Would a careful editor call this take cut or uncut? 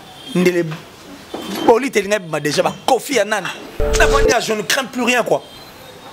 cut